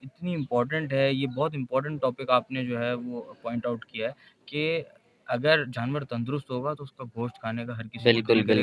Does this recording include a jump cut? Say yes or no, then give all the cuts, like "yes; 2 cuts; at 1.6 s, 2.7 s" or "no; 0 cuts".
no; 0 cuts